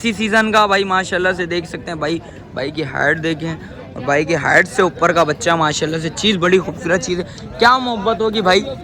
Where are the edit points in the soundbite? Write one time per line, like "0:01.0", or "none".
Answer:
none

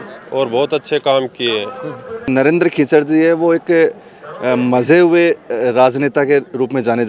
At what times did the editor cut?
0:02.3

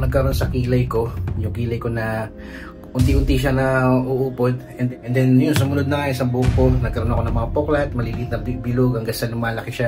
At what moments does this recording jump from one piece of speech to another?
0:04.9

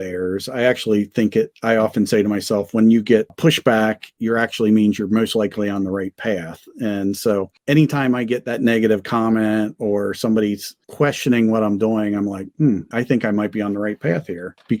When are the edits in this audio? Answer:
none

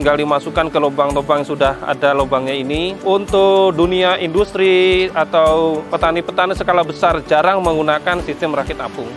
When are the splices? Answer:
0:02.9
0:05.9

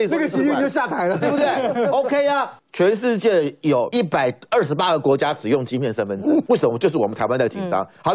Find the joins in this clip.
0:02.5
0:03.9
0:06.4

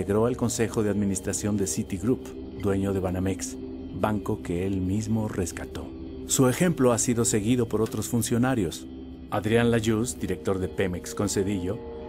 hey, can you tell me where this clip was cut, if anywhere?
0:07.9

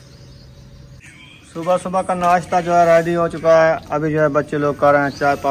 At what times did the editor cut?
0:01.0

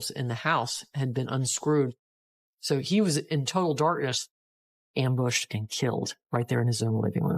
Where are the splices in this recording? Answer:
0:02.0
0:04.7

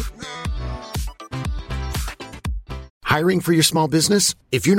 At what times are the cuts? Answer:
0:02.9

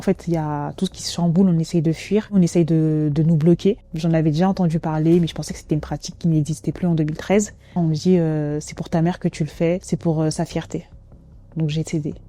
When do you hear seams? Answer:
0:02.4
0:03.9
0:07.7
0:09.8
0:11.3

